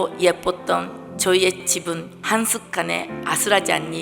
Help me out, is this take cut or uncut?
cut